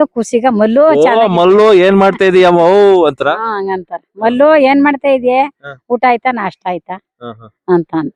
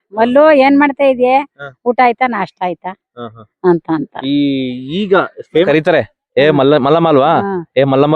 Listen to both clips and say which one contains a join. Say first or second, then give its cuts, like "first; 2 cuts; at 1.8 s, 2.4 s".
second; 1 cut; at 5.7 s